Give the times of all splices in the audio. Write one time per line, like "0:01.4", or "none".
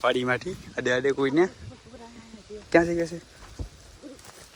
none